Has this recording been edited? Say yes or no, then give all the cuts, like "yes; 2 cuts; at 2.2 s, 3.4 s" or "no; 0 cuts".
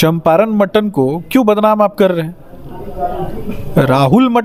no; 0 cuts